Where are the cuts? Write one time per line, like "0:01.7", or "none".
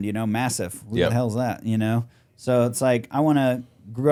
none